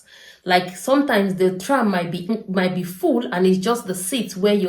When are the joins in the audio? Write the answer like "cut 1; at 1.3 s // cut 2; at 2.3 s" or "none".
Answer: cut 1; at 2.3 s